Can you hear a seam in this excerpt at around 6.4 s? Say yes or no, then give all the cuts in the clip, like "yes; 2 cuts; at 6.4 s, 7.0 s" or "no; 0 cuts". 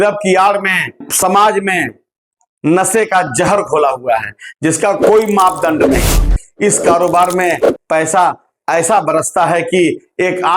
yes; 2 cuts; at 1.0 s, 6.4 s